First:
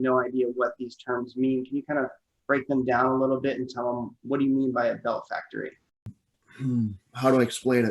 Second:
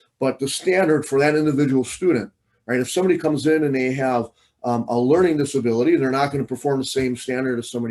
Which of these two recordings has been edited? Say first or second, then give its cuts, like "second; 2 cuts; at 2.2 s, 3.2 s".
first; 1 cut; at 6.1 s